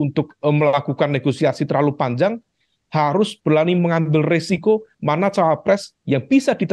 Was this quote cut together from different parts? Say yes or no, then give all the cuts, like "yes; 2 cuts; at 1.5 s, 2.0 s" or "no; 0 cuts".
yes; 1 cut; at 4.9 s